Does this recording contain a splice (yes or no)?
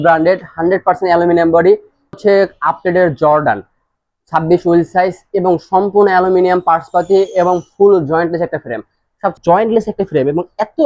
yes